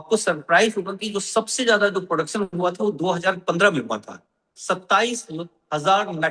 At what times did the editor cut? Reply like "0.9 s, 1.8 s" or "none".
none